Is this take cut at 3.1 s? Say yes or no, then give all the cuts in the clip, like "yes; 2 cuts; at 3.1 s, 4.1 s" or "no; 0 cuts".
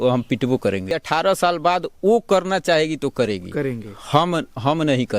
no; 1 cut; at 0.9 s